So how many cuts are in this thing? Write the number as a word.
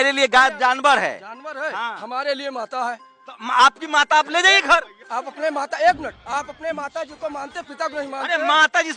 zero